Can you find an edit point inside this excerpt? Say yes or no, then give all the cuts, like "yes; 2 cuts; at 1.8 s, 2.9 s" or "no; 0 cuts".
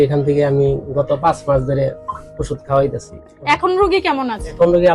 no; 0 cuts